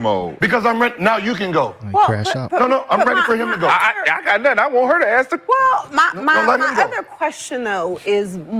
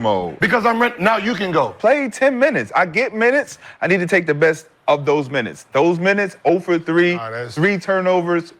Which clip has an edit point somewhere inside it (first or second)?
second